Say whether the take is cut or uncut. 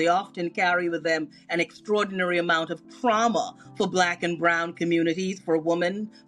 uncut